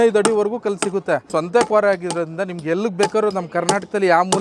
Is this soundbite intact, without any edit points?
no; 1 cut; at 1.3 s

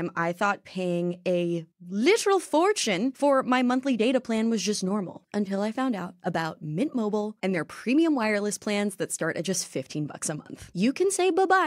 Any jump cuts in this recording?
yes; 3 cuts; at 3.1 s, 5.2 s, 10.7 s

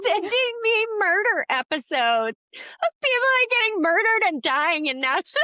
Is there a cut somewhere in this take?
no; 0 cuts

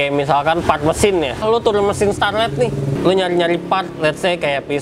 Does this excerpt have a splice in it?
yes; 2 cuts; at 1.4 s, 2.9 s

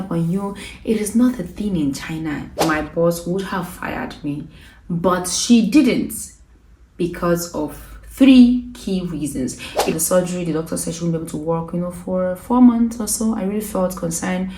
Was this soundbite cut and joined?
yes; 2 cuts; at 2.5 s, 9.9 s

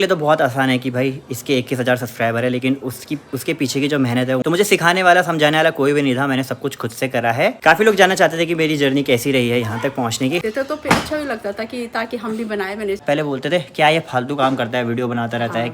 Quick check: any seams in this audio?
yes; 4 cuts; at 4.4 s, 7.6 s, 10.5 s, 13.0 s

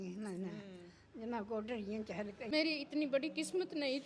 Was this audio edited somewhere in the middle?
yes; 1 cut; at 2.5 s

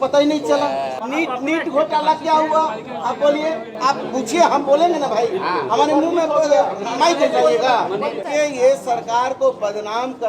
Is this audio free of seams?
no; 3 cuts; at 0.9 s, 3.7 s, 8.3 s

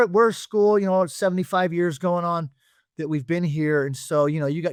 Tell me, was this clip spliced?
no; 0 cuts

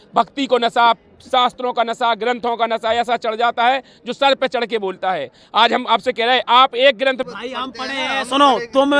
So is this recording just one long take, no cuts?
no; 1 cut; at 7.2 s

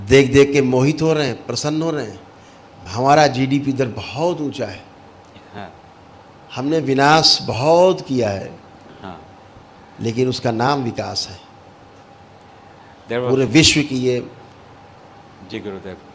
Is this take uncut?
yes; 0 cuts

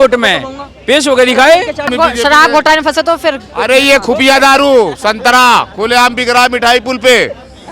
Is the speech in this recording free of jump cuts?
no; 1 cut; at 1.9 s

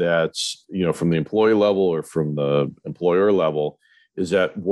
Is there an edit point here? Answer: no; 0 cuts

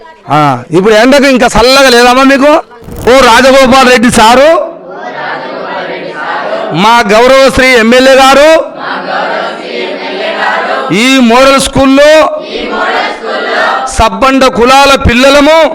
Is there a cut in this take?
yes; 1 cut; at 2.9 s

